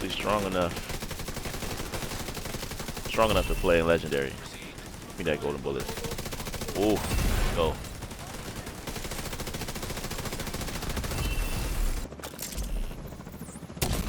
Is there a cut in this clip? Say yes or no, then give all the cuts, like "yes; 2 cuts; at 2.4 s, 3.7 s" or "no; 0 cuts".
yes; 1 cut; at 12.0 s